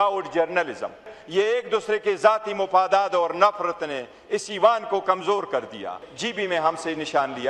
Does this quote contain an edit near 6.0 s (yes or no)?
yes